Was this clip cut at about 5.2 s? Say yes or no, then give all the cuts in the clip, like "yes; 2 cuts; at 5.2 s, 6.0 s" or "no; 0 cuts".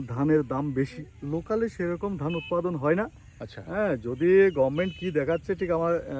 no; 1 cut; at 1.1 s